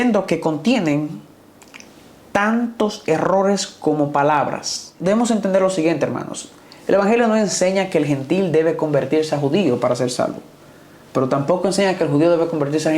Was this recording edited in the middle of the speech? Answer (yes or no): yes